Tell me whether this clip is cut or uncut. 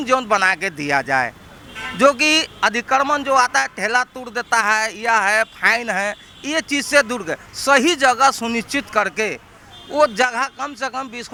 uncut